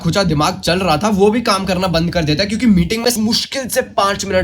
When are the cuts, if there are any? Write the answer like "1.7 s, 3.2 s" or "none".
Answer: 3.1 s